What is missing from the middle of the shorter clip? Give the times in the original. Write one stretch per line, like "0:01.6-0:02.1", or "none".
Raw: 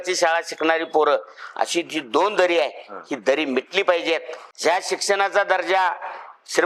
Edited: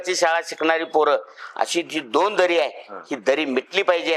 none